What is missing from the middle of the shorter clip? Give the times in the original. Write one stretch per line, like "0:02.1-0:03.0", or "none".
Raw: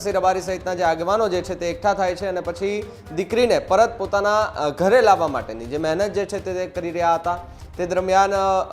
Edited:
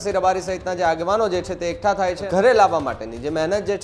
0:02.2-0:04.7